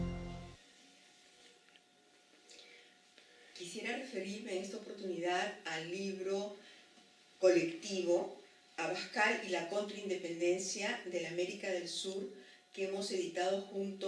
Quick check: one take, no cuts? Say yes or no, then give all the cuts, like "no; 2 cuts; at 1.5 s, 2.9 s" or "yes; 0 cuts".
yes; 0 cuts